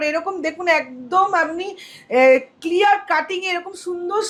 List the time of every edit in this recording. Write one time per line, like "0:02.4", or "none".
none